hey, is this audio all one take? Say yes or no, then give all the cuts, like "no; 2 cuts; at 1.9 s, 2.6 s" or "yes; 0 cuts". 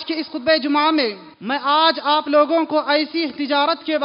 no; 1 cut; at 1.3 s